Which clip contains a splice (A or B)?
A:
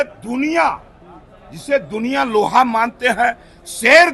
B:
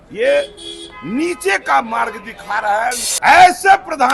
B